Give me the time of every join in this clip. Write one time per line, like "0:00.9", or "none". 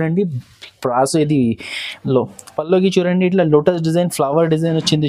0:02.1